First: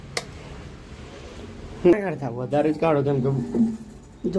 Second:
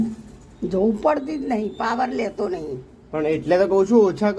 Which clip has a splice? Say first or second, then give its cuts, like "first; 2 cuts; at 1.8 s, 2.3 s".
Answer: first; 1 cut; at 1.9 s